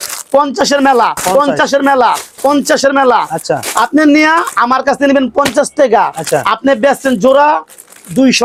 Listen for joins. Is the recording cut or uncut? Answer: uncut